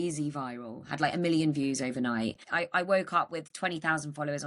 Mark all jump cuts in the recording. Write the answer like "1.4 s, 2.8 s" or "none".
2.6 s